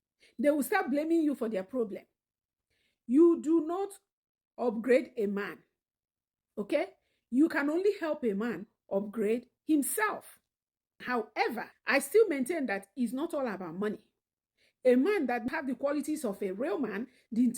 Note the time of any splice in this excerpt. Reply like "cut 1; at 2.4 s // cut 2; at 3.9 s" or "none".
cut 1; at 11.0 s // cut 2; at 15.4 s